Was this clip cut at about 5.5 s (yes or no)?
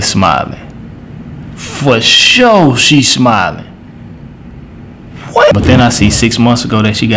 yes